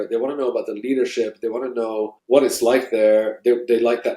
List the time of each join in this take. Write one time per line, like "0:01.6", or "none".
0:02.2